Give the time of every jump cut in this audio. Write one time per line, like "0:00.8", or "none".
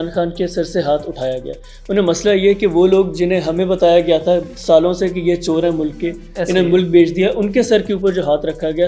none